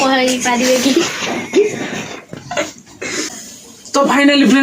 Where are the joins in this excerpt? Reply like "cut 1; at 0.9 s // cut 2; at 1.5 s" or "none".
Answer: cut 1; at 3.4 s